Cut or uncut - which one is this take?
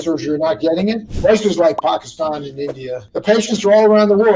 cut